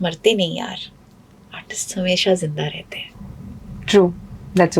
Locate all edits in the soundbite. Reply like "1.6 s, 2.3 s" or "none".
none